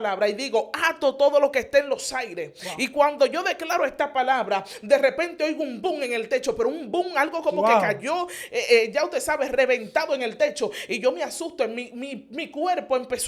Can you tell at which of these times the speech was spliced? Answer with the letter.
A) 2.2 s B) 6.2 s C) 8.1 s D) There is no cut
D